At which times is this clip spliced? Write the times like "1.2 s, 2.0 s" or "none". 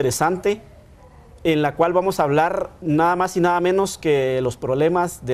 2.2 s